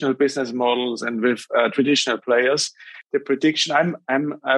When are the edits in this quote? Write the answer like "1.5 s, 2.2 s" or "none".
2.9 s